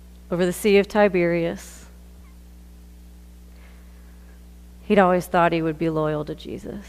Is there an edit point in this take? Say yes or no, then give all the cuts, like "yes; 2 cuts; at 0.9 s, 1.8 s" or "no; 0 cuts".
no; 0 cuts